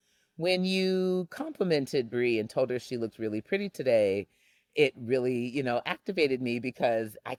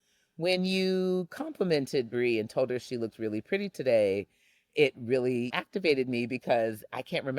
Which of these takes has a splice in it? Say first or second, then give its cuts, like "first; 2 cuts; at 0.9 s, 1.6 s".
second; 1 cut; at 5.5 s